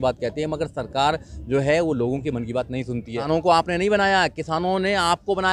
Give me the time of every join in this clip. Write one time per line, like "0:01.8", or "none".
0:03.2